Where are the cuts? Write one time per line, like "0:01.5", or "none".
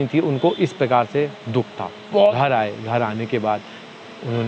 0:02.3